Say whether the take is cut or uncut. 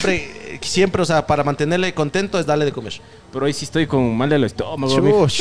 uncut